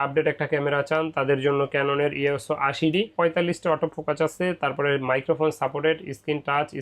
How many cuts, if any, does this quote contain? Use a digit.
1